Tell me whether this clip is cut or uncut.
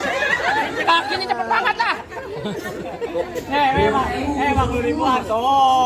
uncut